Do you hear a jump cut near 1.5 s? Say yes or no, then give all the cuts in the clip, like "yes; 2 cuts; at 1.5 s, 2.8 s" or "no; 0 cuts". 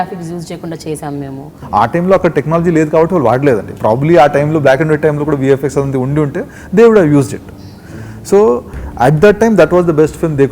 yes; 1 cut; at 1.5 s